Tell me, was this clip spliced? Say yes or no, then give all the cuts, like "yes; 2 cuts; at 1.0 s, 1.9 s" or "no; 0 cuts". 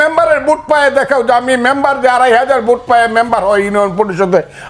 no; 0 cuts